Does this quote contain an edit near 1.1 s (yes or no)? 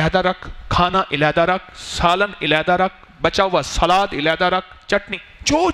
no